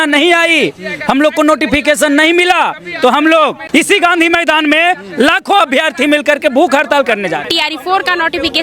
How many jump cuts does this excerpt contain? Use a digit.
2